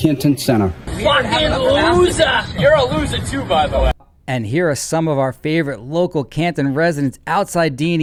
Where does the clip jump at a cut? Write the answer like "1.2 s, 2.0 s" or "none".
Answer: none